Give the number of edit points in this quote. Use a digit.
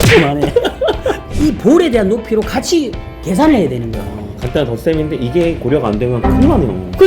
1